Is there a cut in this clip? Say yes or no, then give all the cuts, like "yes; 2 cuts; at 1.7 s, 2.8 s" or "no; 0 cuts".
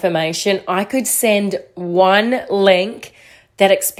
no; 0 cuts